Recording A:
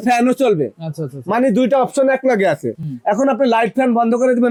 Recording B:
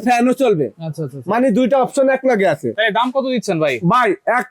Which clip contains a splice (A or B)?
B